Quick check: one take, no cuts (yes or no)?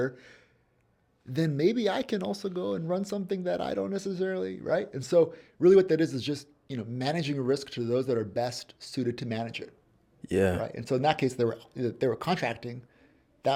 yes